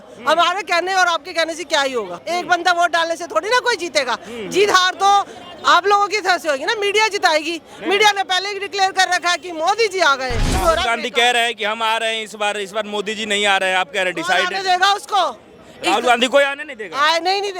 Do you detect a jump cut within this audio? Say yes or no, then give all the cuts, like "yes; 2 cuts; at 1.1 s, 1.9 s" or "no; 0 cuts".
yes; 2 cuts; at 2.2 s, 10.5 s